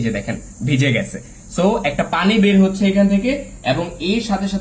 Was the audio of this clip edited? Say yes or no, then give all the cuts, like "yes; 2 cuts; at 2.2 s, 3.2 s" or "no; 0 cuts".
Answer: no; 0 cuts